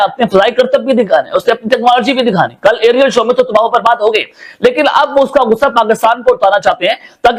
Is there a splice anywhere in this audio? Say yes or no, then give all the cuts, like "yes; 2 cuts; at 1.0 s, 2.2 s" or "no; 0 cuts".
no; 0 cuts